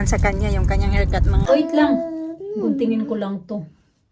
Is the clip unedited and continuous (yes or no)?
no